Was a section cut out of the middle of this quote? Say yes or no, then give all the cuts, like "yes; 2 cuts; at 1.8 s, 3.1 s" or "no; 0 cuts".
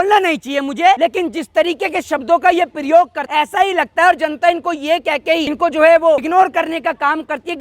yes; 4 cuts; at 1.0 s, 3.2 s, 5.5 s, 6.2 s